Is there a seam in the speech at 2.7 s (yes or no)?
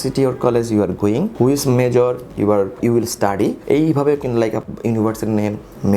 yes